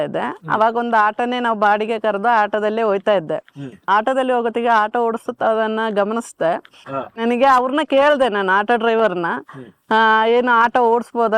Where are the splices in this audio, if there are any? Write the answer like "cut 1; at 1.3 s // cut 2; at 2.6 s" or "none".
cut 1; at 3.9 s